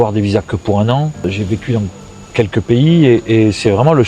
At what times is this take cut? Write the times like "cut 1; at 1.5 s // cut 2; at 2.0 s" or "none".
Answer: cut 1; at 1.2 s